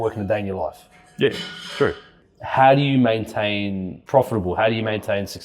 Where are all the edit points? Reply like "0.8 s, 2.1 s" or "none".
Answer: 2.1 s, 3.9 s